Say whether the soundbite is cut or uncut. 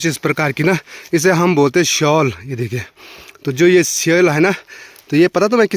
uncut